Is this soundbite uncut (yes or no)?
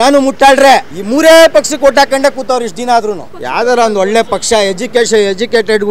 no